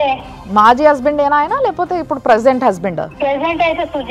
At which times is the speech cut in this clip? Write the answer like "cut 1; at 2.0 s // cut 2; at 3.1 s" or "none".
cut 1; at 3.1 s

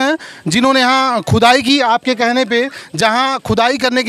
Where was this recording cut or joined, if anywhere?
none

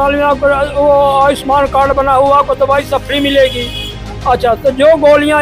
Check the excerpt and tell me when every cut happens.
none

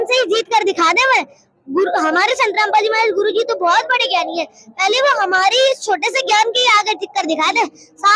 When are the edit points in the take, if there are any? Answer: none

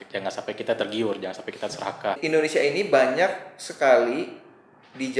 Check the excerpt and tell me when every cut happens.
cut 1; at 2.2 s

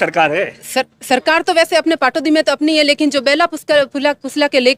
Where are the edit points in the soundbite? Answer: none

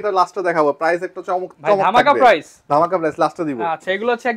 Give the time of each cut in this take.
none

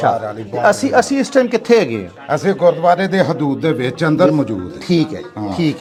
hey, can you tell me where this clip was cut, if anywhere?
none

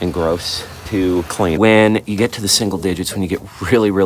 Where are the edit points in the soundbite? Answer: cut 1; at 1.6 s

